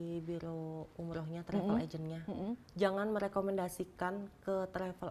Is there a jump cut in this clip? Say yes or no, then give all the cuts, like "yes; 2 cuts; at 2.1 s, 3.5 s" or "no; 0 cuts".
yes; 1 cut; at 2.6 s